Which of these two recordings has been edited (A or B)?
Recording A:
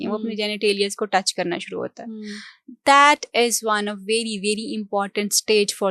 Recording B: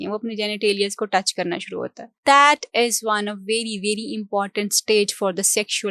B